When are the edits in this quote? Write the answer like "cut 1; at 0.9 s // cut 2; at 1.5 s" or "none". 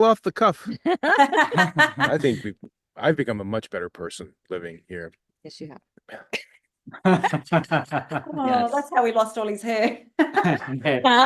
cut 1; at 2.1 s // cut 2; at 8.3 s